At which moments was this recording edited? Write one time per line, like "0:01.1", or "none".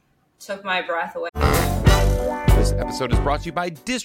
0:01.3